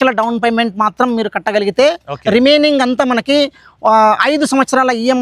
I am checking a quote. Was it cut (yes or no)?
no